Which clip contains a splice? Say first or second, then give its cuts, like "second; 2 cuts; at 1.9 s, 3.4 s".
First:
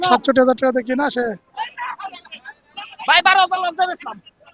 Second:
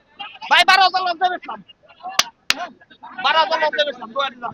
first; 1 cut; at 1.5 s